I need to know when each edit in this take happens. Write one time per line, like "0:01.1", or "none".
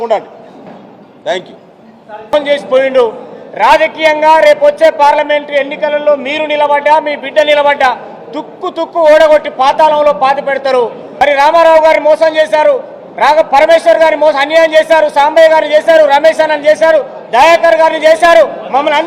0:02.3
0:11.0